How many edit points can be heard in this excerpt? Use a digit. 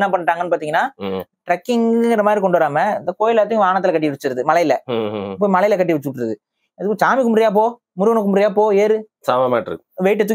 0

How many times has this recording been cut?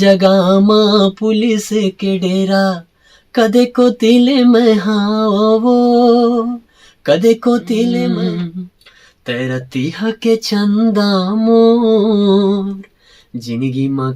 1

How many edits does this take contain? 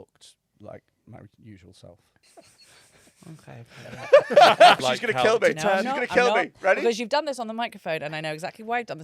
2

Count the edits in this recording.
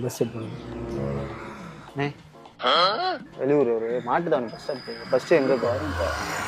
2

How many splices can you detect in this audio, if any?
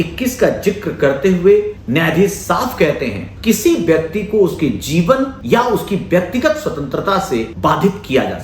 4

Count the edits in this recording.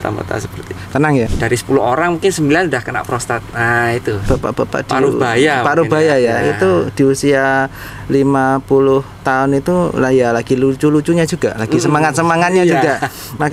2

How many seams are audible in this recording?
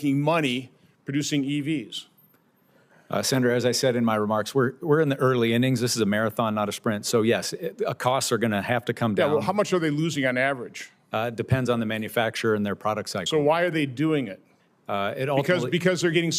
0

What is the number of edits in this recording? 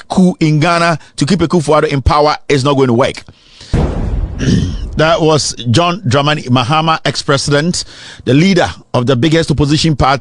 1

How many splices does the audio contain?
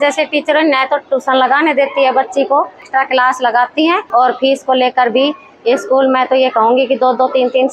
2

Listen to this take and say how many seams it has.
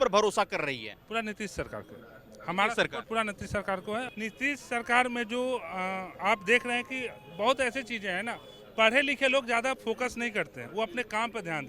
1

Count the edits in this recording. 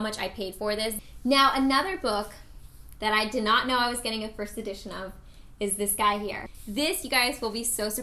2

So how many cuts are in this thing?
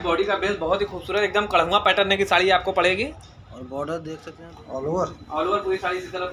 1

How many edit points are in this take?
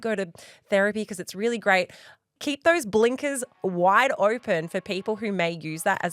2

